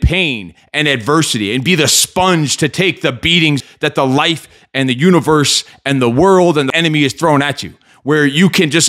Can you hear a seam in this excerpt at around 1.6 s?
no; 2 cuts; at 3.6 s, 6.7 s

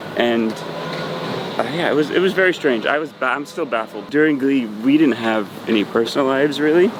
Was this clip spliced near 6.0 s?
no; 1 cut; at 4.0 s

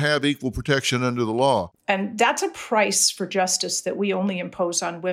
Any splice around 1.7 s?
yes; 1 cut; at 1.7 s

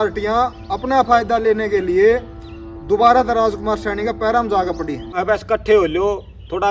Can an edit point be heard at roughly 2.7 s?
no; 1 cut; at 5.2 s

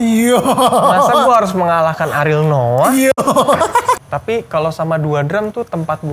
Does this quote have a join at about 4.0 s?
yes; 1 cut; at 4.0 s

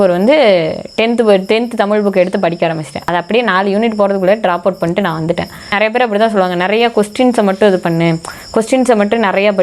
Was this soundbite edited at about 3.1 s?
yes; 2 cuts; at 3.1 s, 5.7 s

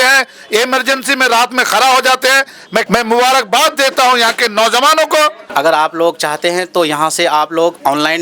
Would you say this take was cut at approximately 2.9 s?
yes; 2 cuts; at 2.9 s, 5.4 s

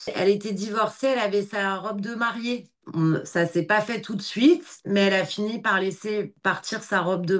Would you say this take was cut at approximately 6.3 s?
yes; 2 cuts; at 2.8 s, 6.3 s

